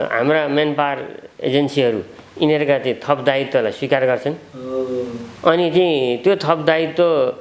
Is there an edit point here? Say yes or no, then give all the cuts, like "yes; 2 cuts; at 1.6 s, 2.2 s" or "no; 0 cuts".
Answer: no; 0 cuts